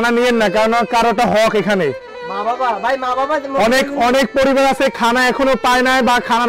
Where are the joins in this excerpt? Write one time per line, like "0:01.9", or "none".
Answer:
none